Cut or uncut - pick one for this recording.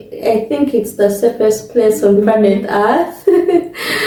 uncut